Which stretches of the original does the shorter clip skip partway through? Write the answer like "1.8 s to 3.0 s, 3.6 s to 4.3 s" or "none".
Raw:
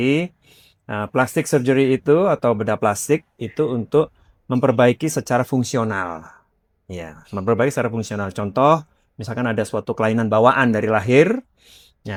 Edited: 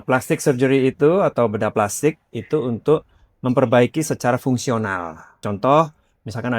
6.4 s to 8.3 s

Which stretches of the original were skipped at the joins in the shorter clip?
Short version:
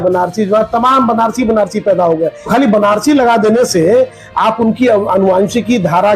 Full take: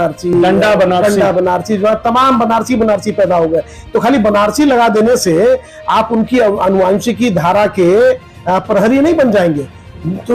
3.8 s to 4.0 s

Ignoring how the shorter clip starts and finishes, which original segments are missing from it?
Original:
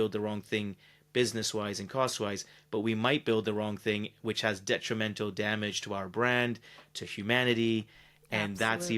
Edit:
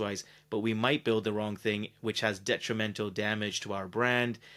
none

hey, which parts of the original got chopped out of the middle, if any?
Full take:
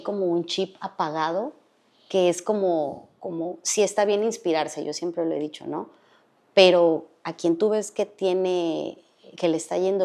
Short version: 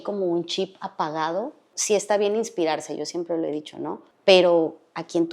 1.7 s to 3.6 s, 5.9 s to 6.4 s

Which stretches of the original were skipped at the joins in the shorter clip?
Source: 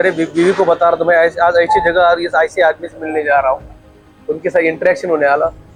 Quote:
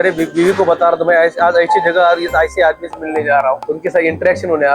3.7 s to 4.3 s

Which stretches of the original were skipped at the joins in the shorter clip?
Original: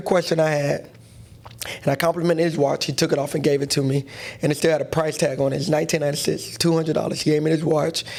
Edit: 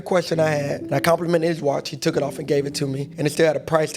0.8 s to 1.8 s, 4.0 s to 4.3 s

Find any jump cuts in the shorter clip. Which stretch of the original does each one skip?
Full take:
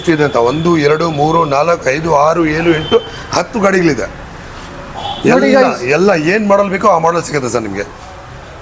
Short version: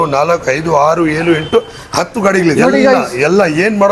3.9 s to 5.2 s

